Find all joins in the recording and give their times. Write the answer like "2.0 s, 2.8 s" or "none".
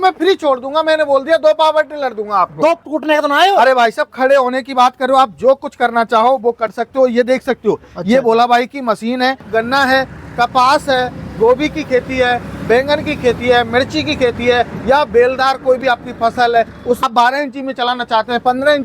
2.8 s, 9.5 s, 17.0 s